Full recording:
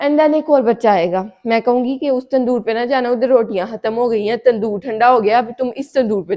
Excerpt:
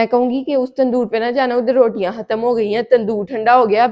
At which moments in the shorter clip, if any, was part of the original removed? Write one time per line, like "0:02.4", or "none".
none

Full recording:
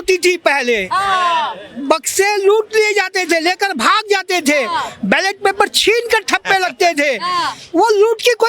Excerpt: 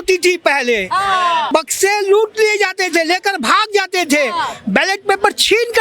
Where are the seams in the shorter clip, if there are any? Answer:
0:01.5

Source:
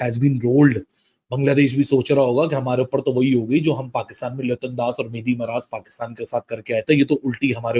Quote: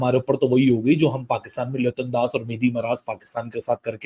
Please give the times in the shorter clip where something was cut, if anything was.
none

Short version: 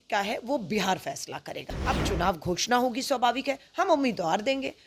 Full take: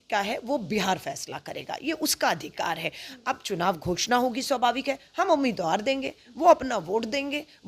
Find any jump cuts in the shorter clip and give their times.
0:01.7

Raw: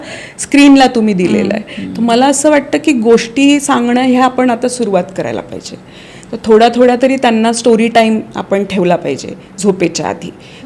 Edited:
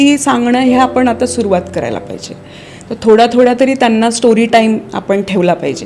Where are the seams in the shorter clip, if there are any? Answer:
none

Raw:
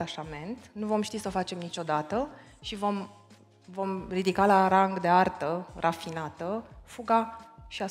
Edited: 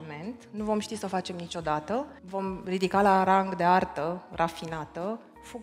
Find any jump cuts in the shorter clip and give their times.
0:02.2

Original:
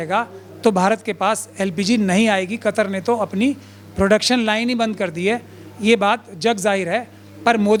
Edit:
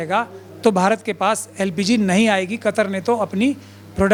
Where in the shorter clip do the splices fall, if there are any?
none

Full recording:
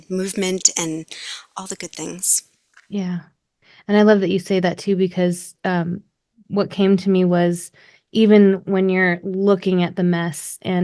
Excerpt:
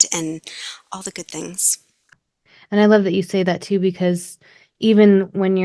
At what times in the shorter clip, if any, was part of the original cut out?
0:02.1
0:04.4

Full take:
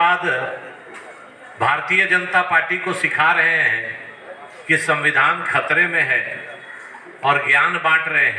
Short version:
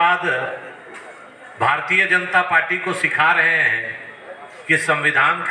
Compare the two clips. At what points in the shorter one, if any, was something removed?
none

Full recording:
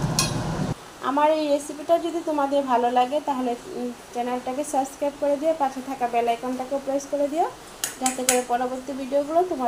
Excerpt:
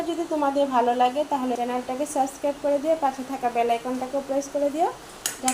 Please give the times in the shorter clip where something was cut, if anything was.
0:01.6

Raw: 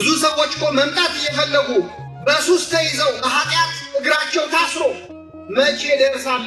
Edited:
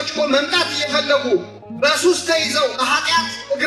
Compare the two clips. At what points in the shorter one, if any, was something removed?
none

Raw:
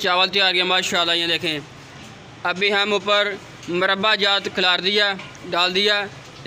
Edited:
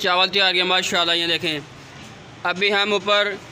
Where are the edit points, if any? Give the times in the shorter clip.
none

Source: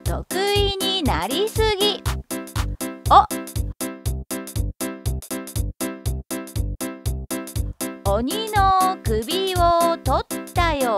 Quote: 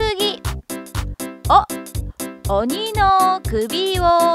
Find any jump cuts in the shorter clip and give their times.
0:02.4

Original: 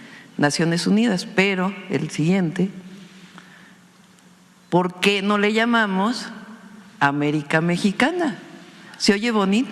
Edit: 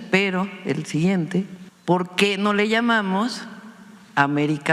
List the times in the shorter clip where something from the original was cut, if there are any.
0:01.6

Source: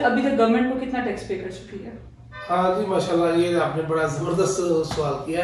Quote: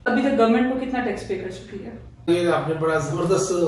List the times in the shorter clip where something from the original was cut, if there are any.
0:02.3

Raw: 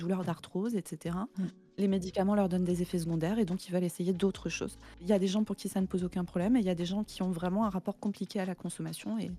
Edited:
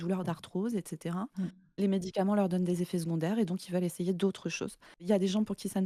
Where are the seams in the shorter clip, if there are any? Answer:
none

